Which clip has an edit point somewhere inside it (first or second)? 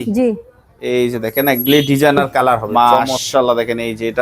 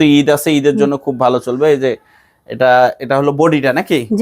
first